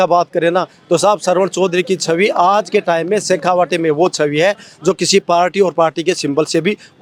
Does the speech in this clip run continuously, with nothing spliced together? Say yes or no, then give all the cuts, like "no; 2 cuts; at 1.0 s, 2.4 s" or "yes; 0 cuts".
yes; 0 cuts